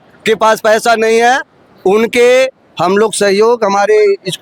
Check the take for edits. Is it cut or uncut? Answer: uncut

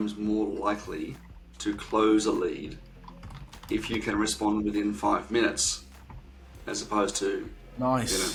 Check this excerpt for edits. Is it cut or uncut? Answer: uncut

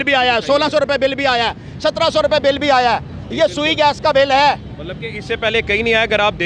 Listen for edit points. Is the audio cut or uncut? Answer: uncut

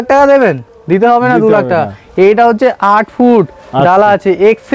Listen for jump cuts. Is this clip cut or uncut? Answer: uncut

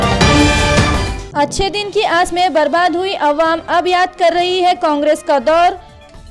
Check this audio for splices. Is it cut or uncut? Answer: cut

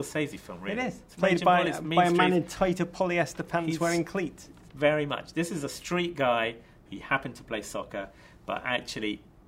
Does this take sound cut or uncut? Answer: uncut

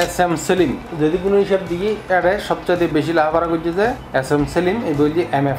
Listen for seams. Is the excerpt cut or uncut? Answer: cut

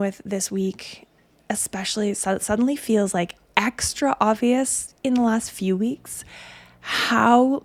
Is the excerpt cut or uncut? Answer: uncut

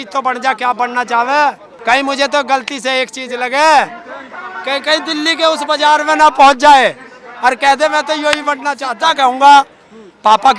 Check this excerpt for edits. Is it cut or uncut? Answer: cut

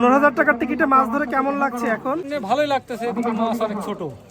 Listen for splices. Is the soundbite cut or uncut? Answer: cut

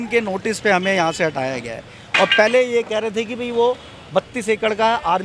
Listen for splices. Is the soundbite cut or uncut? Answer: uncut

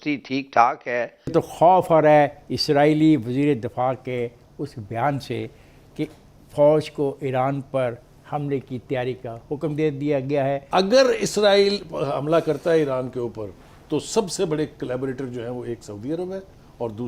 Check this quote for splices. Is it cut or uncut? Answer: cut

